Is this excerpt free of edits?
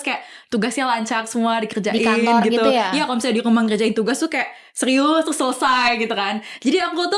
yes; 0 cuts

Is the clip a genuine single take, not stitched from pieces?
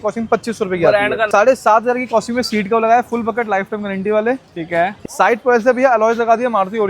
no; 2 cuts; at 1.3 s, 5.0 s

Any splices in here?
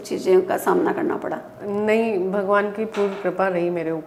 no; 0 cuts

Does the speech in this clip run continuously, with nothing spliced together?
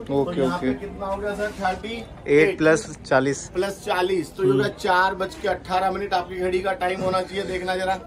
yes; 0 cuts

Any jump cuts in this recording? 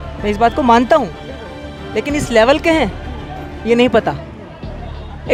no; 0 cuts

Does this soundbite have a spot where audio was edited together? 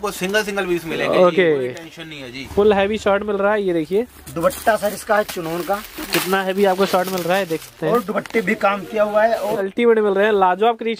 yes; 2 cuts; at 2.3 s, 9.6 s

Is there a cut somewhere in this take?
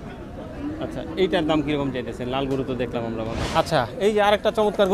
yes; 1 cut; at 3.4 s

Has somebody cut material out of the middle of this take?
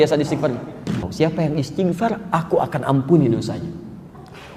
yes; 1 cut; at 1.1 s

